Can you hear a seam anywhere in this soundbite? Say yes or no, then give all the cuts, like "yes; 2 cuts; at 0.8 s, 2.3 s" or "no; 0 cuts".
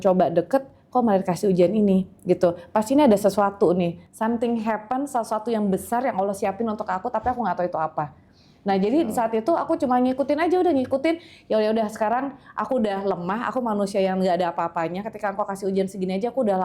no; 0 cuts